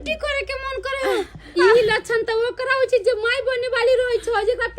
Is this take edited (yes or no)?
yes